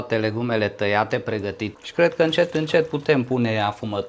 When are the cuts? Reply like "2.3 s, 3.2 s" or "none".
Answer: 1.7 s

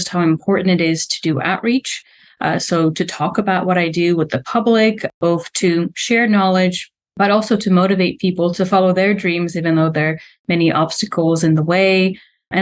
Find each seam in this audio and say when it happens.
none

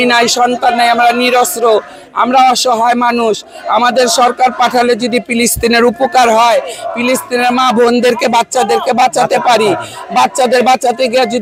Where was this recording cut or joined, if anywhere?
none

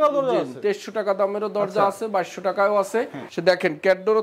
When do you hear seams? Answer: 3.2 s

